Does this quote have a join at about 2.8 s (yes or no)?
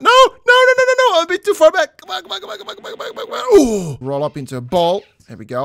no